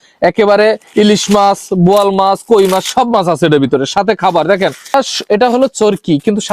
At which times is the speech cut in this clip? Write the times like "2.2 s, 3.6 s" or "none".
4.9 s